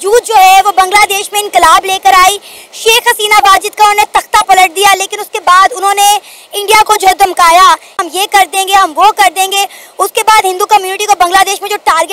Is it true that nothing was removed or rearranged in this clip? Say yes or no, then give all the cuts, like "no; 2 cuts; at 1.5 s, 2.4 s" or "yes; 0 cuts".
no; 1 cut; at 8.0 s